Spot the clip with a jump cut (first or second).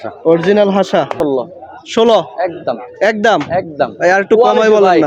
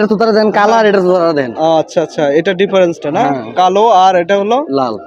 first